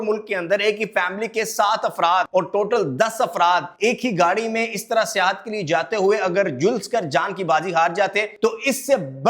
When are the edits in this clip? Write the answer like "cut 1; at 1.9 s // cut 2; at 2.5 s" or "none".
cut 1; at 2.3 s // cut 2; at 3.7 s // cut 3; at 8.3 s